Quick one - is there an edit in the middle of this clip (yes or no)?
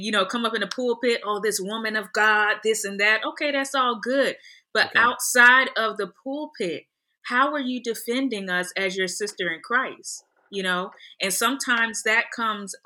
no